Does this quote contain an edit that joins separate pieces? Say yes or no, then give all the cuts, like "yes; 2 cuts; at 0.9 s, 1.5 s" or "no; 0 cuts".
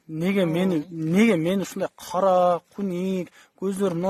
no; 0 cuts